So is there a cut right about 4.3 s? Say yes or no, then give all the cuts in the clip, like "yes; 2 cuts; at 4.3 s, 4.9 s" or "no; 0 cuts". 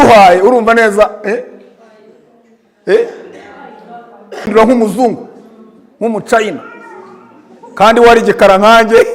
yes; 1 cut; at 4.3 s